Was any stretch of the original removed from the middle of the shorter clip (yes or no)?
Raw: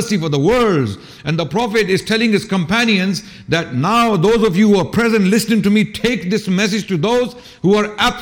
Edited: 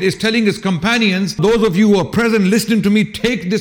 yes